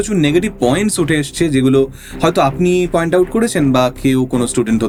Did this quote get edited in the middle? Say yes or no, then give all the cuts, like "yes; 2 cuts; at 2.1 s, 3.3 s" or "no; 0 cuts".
no; 0 cuts